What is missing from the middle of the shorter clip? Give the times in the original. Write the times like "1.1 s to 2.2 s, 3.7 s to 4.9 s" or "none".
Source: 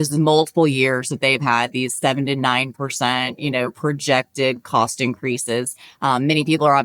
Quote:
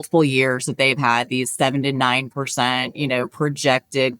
none